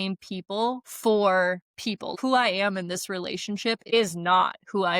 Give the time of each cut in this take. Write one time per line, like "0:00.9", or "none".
0:02.1

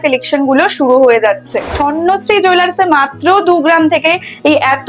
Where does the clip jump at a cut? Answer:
0:01.7

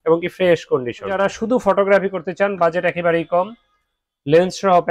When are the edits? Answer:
0:01.1

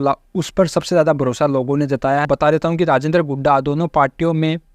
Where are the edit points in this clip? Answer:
0:02.3

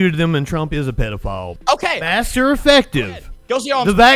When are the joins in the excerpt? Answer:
0:01.5

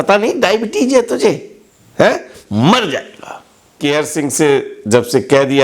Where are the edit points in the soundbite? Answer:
0:03.7

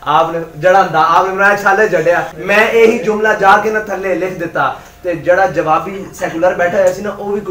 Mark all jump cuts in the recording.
0:02.3

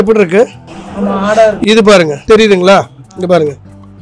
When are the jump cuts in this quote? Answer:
0:02.2

